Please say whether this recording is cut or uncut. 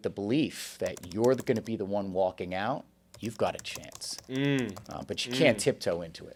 uncut